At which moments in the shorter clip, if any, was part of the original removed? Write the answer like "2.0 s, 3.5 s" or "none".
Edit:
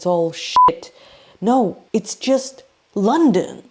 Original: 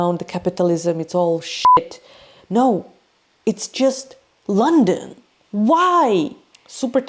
1.8 s